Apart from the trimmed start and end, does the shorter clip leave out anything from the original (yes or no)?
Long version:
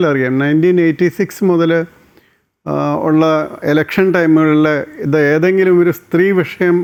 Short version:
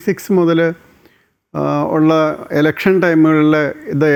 no